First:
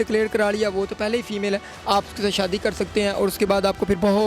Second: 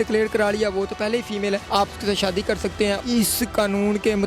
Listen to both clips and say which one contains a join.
second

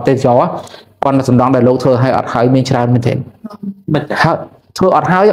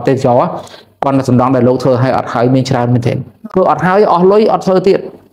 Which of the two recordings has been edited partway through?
second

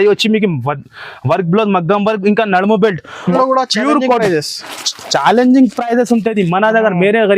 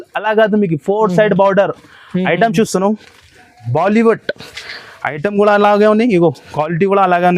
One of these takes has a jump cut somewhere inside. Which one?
first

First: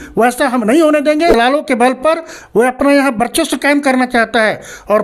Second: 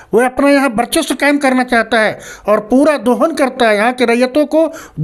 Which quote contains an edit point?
first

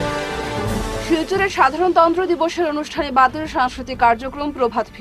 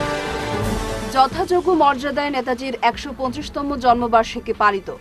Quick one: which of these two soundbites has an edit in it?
first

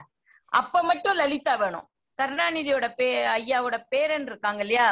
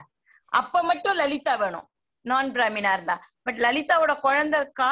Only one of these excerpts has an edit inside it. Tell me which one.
first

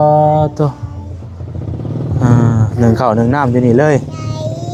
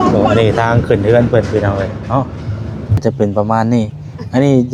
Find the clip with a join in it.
second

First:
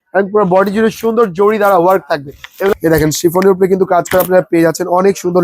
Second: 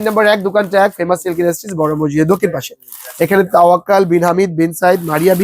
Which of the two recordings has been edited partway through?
first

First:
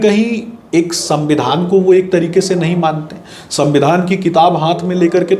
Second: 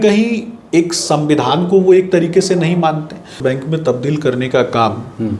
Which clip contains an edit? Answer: second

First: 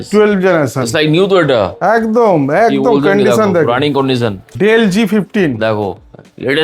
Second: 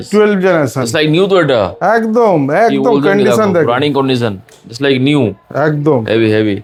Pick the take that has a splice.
first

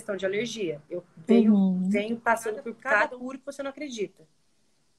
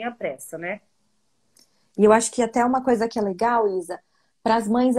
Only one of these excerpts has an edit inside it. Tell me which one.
first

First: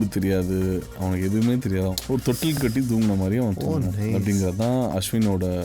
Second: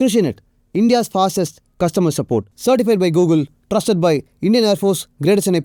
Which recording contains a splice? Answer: first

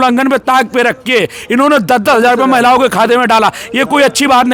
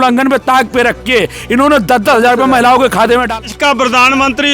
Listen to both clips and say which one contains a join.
second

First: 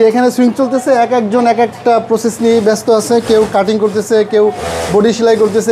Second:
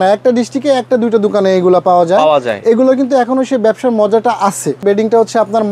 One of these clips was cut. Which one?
second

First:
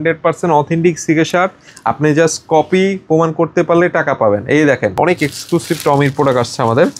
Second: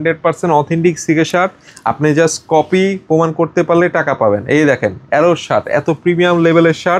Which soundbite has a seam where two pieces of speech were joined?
first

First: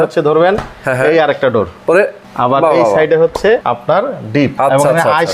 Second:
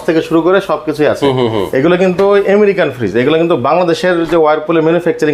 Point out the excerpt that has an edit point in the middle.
first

